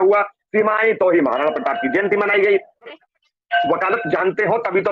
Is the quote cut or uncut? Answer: cut